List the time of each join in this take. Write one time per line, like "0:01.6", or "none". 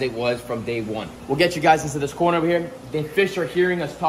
0:01.1